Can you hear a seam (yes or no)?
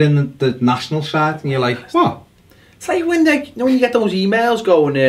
no